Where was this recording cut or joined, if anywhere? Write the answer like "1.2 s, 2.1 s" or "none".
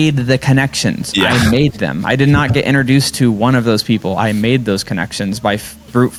none